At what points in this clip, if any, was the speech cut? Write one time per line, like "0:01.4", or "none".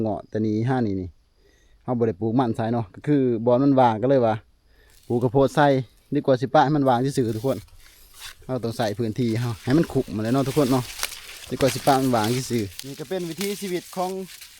0:12.9